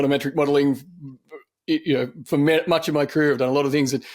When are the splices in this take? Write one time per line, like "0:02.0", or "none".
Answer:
none